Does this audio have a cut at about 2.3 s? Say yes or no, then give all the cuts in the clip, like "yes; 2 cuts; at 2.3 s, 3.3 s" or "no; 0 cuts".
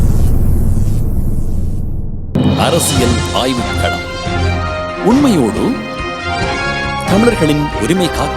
yes; 1 cut; at 2.3 s